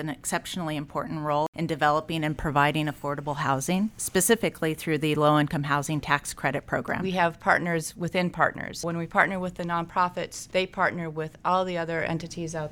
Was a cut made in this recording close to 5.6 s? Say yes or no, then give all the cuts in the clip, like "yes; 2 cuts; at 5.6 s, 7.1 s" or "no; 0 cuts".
no; 5 cuts; at 1.5 s, 4.0 s, 7.0 s, 8.9 s, 10.4 s